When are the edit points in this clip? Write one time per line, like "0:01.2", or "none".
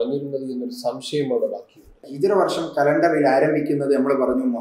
0:02.0